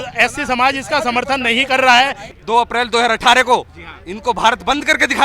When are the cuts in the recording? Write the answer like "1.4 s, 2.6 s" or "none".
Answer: 2.3 s